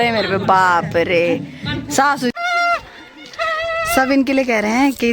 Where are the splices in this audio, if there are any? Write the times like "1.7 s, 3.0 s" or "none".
2.3 s